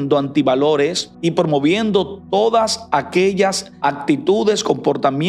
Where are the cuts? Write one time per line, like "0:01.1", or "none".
0:01.1
0:03.7